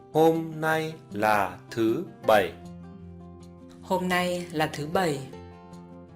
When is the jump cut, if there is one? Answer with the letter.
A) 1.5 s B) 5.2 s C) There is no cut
B